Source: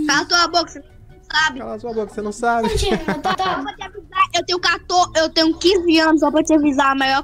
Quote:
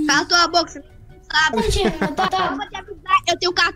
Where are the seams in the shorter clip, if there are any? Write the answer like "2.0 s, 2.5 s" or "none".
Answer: 1.5 s